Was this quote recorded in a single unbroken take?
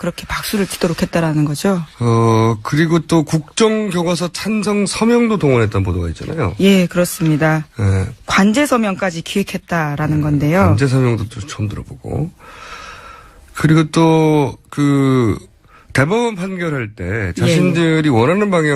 yes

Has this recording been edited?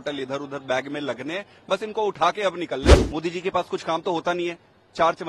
yes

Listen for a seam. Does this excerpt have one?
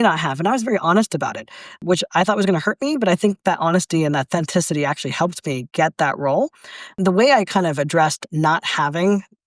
yes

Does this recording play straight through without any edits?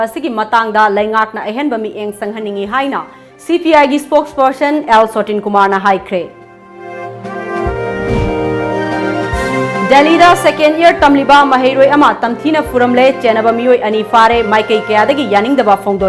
yes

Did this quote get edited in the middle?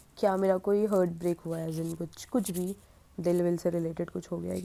no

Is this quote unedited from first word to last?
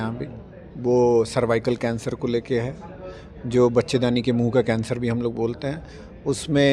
yes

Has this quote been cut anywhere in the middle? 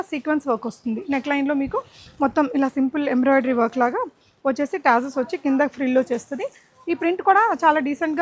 no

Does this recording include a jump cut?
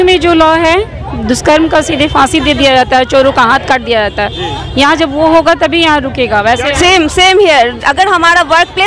yes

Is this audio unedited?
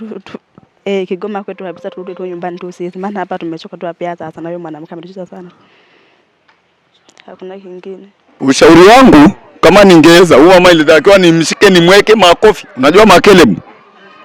no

